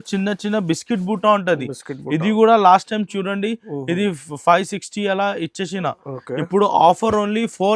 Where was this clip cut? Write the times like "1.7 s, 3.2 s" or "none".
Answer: none